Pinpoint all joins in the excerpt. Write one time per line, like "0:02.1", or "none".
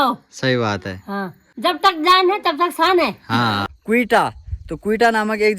0:03.6